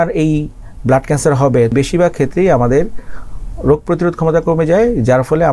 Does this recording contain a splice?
yes; 1 cut; at 1.7 s

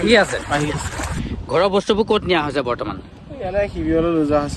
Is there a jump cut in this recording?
yes; 1 cut; at 1.1 s

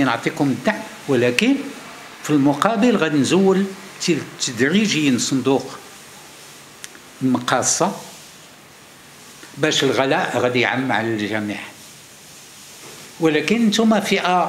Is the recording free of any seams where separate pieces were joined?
yes; 0 cuts

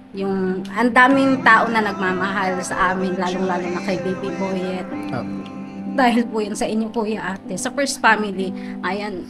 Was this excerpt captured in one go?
yes; 0 cuts

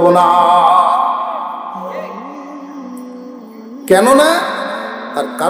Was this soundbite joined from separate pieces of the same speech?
no; 0 cuts

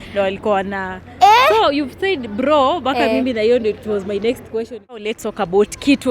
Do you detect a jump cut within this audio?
yes; 1 cut; at 5.2 s

